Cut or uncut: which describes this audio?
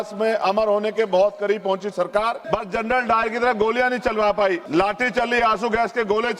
cut